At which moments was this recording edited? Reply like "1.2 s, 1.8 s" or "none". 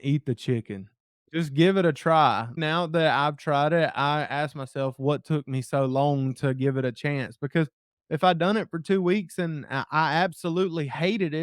1.3 s, 2.6 s